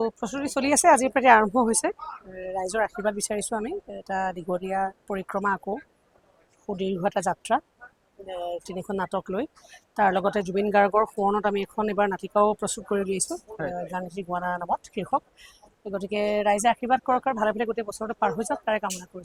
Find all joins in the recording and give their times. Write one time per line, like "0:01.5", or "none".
none